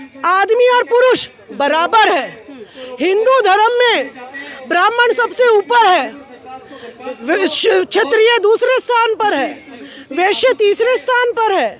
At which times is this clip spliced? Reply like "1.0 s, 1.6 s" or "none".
none